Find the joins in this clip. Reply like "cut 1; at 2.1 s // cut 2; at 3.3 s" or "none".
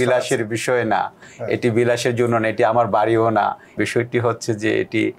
cut 1; at 3.8 s